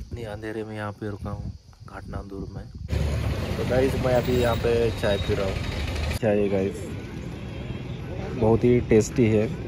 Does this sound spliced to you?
yes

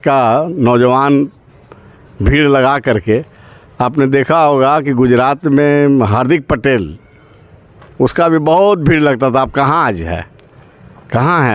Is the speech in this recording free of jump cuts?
yes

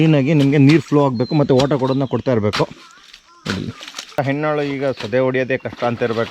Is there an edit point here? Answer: yes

